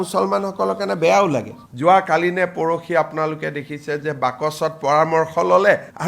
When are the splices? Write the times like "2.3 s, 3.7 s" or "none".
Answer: 1.6 s